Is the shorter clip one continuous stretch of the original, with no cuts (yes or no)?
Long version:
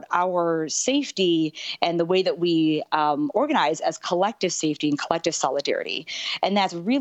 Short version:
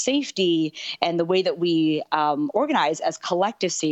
yes